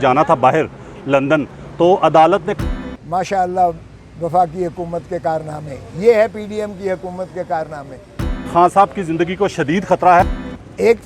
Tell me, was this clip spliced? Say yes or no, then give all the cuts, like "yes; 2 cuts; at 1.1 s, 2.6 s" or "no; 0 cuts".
yes; 3 cuts; at 2.5 s, 8.4 s, 10.3 s